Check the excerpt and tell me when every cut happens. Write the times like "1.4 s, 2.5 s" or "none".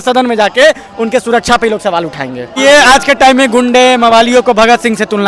2.6 s